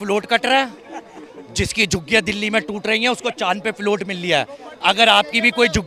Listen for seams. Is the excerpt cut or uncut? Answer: uncut